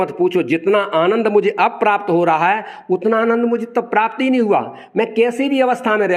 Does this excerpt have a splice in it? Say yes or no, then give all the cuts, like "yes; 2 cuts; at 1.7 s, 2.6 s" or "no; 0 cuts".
no; 0 cuts